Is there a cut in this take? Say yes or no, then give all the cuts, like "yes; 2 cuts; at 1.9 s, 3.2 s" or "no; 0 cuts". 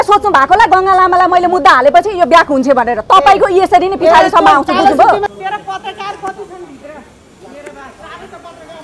yes; 1 cut; at 5.3 s